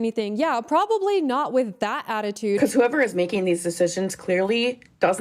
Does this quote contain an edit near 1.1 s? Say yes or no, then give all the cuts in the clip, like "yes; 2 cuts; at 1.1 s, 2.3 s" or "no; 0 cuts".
no; 1 cut; at 2.6 s